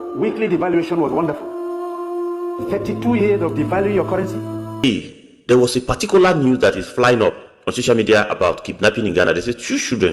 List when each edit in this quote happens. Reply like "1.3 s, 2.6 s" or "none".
4.8 s

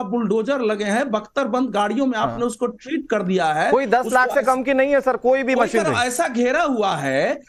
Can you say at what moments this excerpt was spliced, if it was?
none

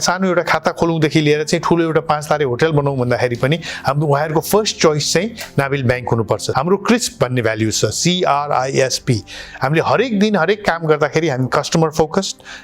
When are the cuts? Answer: 6.5 s

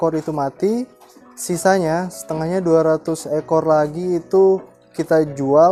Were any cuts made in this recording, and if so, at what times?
none

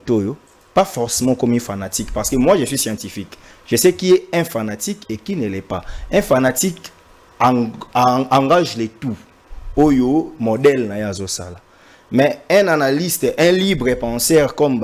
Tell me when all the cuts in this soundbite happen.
none

